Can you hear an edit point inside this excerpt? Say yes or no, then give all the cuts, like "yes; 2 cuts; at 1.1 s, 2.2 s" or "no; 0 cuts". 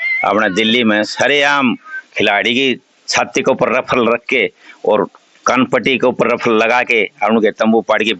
no; 0 cuts